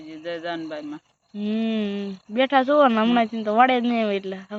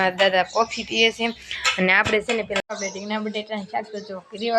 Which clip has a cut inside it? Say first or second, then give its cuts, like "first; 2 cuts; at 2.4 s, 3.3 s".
second; 1 cut; at 2.6 s